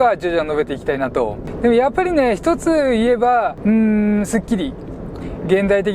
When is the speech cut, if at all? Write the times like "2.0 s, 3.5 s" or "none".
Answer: 1.5 s, 3.5 s